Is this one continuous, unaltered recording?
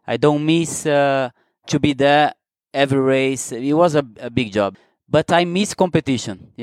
no; 1 cut; at 4.8 s

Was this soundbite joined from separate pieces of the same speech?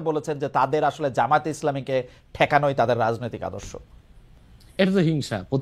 no; 0 cuts

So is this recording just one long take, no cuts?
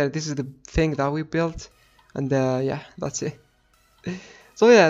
yes; 0 cuts

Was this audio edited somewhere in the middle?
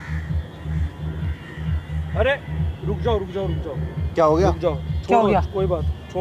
no; 0 cuts

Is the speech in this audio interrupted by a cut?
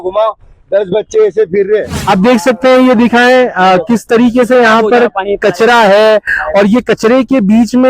yes; 1 cut; at 2.0 s

